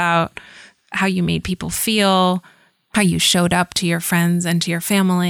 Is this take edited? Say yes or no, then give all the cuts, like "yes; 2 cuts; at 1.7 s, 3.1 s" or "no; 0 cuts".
no; 0 cuts